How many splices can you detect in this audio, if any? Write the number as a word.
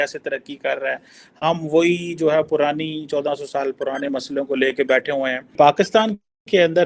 one